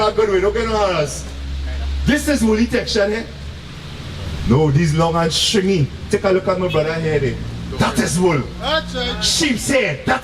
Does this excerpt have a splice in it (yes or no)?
no